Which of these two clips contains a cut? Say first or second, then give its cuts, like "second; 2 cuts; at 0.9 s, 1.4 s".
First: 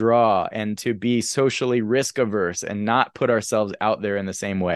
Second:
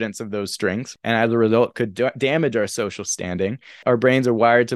second; 2 cuts; at 0.9 s, 3.8 s